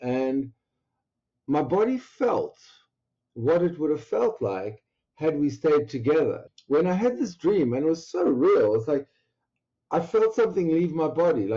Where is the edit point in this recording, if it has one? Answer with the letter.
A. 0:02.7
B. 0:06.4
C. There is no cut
B